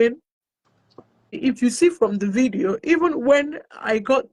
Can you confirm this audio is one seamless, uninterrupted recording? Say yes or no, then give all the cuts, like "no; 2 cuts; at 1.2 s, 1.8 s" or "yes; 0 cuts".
no; 1 cut; at 1.4 s